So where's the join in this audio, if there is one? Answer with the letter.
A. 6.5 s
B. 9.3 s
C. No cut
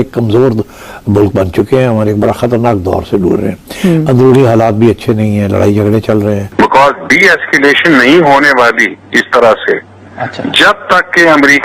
A